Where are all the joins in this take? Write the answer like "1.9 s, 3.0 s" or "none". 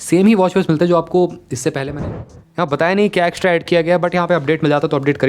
1.9 s